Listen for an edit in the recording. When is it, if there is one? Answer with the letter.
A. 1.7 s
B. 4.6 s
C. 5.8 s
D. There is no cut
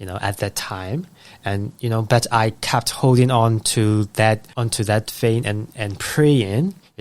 B